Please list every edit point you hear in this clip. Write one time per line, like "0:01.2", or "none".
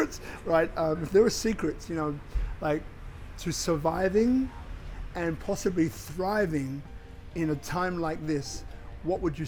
none